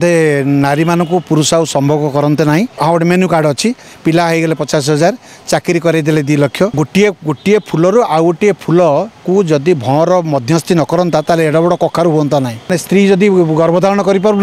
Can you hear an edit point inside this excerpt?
yes; 3 cuts; at 2.7 s, 6.8 s, 12.8 s

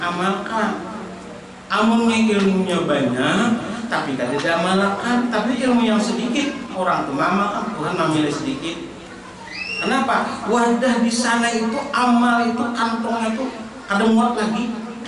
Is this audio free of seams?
no; 1 cut; at 6.7 s

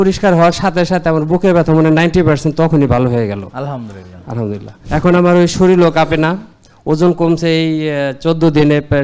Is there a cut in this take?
yes; 1 cut; at 4.7 s

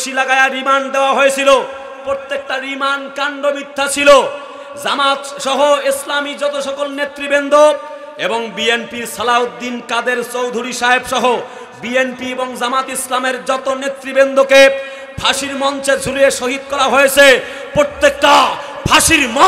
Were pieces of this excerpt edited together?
no; 0 cuts

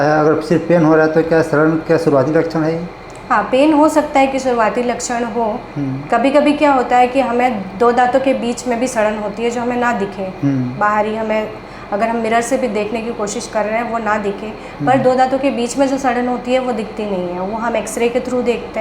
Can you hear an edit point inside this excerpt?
no; 0 cuts

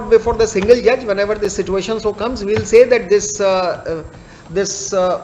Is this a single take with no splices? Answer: yes; 0 cuts

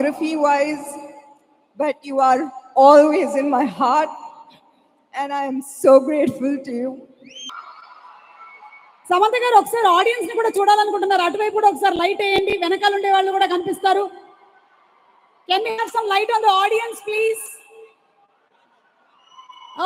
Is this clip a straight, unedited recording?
no; 1 cut; at 7.4 s

